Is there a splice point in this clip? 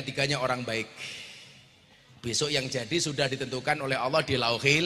no; 0 cuts

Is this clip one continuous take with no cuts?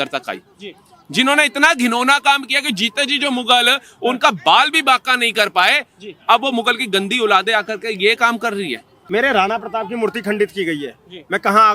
no; 1 cut; at 8.9 s

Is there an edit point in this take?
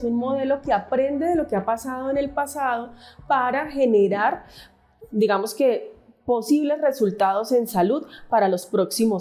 no; 0 cuts

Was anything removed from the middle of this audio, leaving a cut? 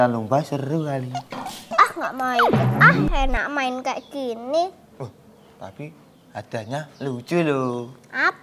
yes; 1 cut; at 1.7 s

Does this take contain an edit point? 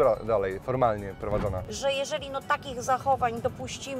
yes; 1 cut; at 1.7 s

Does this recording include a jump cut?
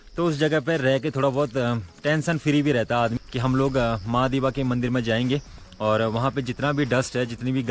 yes; 1 cut; at 3.2 s

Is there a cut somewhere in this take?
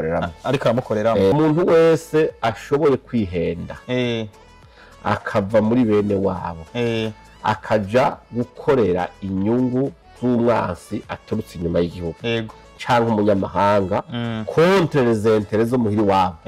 yes; 1 cut; at 1.3 s

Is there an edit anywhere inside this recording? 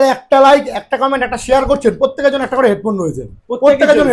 no; 0 cuts

